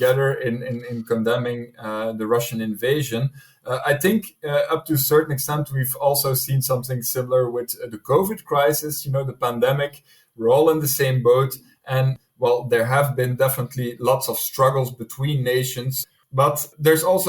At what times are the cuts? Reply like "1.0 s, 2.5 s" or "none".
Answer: 12.2 s, 16.0 s